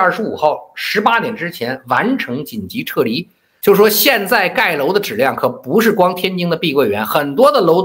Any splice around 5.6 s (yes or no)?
no